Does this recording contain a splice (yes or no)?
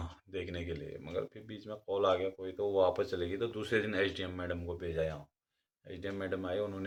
no